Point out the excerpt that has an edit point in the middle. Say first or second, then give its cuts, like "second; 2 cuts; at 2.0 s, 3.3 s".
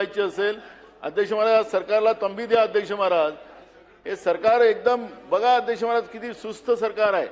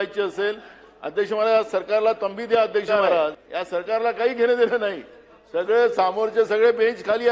second; 1 cut; at 3.4 s